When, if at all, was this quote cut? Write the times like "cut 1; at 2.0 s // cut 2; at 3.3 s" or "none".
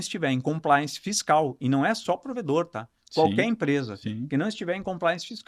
none